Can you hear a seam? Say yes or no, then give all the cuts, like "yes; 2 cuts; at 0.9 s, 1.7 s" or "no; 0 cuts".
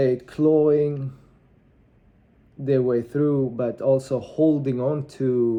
no; 0 cuts